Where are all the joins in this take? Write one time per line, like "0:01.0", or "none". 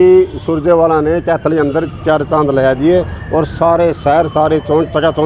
none